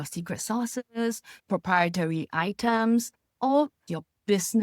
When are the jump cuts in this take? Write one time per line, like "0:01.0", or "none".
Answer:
0:01.4
0:03.3